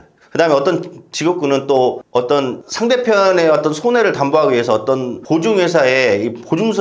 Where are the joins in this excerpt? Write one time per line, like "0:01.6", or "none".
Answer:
0:05.1